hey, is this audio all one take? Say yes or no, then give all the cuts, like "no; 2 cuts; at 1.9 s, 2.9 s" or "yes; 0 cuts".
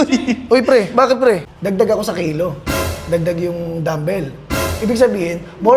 no; 1 cut; at 1.5 s